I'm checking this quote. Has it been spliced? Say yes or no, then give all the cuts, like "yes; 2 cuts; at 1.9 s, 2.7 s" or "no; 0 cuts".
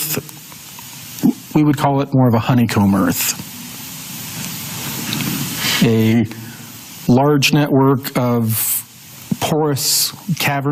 no; 0 cuts